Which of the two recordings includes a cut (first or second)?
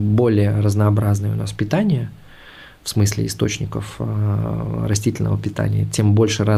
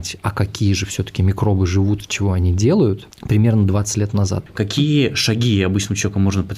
second